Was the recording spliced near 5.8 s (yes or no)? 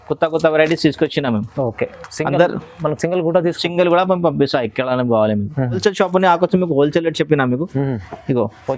yes